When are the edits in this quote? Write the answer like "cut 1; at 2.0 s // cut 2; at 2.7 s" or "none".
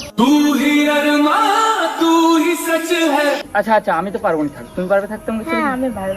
cut 1; at 3.5 s